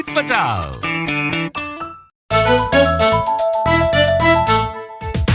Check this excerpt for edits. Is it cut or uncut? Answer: cut